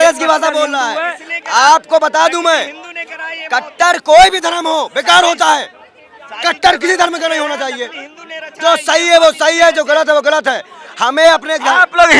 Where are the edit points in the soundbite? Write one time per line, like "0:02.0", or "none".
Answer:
none